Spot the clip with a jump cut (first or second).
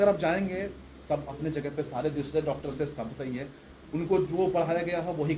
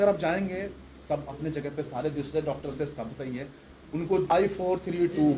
second